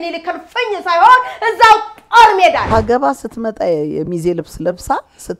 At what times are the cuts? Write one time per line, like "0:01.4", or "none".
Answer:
0:02.6